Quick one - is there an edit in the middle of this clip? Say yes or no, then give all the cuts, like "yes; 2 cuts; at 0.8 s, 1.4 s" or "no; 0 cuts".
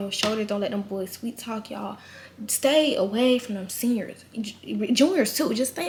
no; 0 cuts